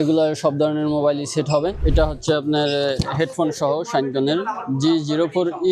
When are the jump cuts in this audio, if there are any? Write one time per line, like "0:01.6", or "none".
0:01.8